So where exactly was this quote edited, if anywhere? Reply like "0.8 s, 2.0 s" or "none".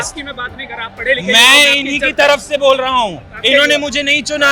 none